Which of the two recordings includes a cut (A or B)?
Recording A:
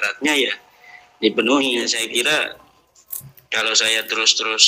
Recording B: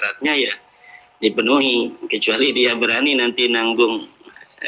A